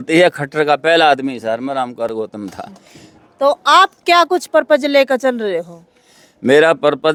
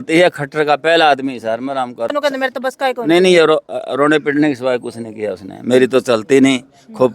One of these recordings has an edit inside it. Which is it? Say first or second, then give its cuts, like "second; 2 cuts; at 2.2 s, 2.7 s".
second; 1 cut; at 2.1 s